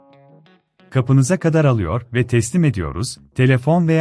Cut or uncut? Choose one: cut